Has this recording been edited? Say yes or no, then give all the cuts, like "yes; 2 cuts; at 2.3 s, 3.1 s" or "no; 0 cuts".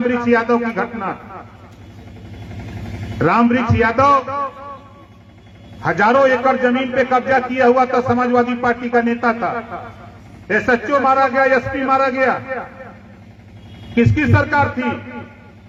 no; 0 cuts